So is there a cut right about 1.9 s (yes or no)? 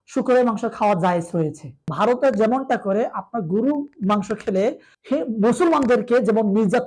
yes